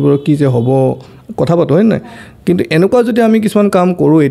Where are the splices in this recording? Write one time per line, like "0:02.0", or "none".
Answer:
none